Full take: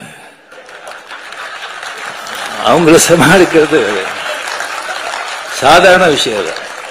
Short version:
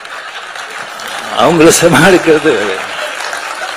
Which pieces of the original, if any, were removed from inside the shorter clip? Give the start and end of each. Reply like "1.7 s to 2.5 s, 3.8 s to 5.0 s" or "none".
none